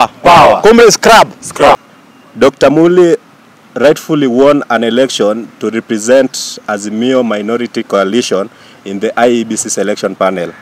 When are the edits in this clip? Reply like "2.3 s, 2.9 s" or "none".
1.8 s